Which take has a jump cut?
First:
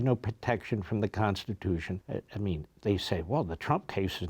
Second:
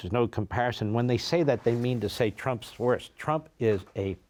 first; 1 cut; at 2.0 s

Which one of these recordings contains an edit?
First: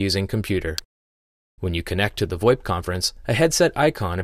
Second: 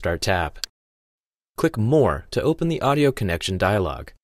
second; 1 cut; at 1.7 s

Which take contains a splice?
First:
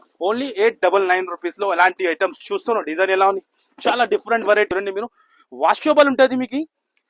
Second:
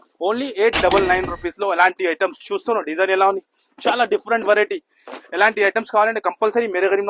first; 1 cut; at 4.7 s

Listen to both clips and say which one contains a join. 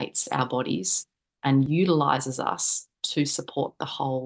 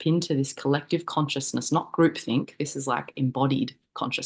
first; 1 cut; at 1.7 s

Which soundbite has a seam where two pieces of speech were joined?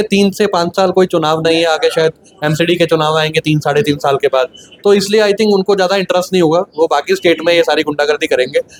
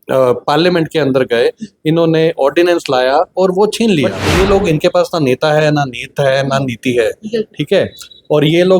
second; 1 cut; at 4.2 s

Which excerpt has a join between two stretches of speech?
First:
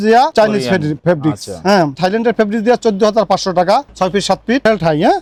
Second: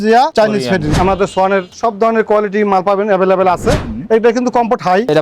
second; 2 cuts; at 1.0 s, 3.8 s

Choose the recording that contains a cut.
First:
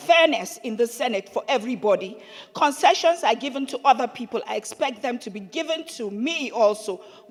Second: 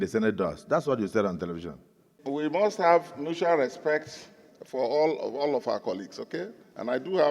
second; 1 cut; at 2.2 s

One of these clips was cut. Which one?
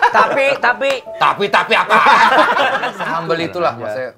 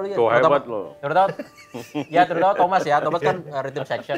first; 1 cut; at 3.0 s

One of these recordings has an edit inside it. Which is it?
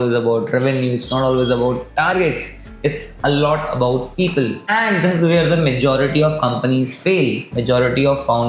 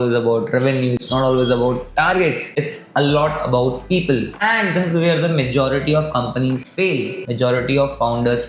second; 1 cut; at 2.4 s

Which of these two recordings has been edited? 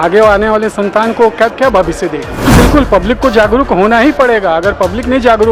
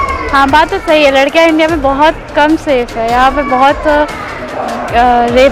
first; 1 cut; at 2.5 s

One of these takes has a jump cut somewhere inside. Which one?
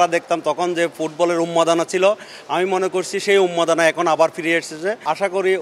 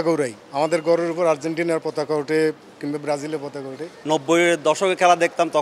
second; 1 cut; at 3.9 s

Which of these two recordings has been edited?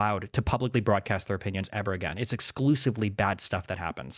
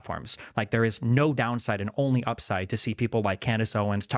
first; 1 cut; at 2.3 s

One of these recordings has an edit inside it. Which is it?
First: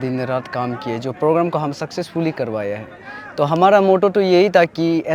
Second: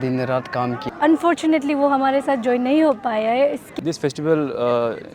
second; 2 cuts; at 0.9 s, 3.8 s

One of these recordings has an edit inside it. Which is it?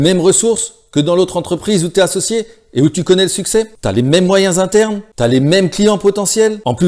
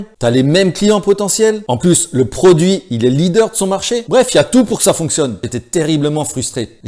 second; 1 cut; at 5.4 s

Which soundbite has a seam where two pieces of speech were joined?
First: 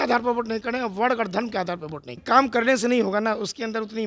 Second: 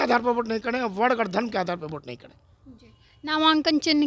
first; 1 cut; at 2.2 s

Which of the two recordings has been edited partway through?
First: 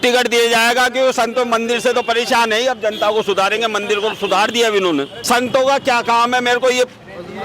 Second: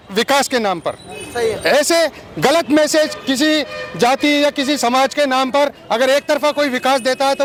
first; 1 cut; at 5.2 s

